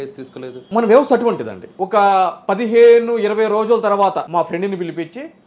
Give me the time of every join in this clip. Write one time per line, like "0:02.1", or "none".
none